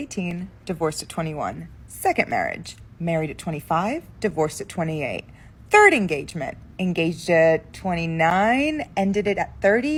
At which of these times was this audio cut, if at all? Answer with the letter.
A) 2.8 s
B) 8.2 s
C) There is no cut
C